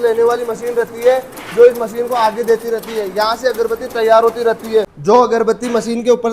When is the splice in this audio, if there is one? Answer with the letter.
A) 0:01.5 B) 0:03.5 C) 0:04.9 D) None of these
C